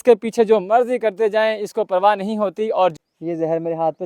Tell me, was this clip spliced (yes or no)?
yes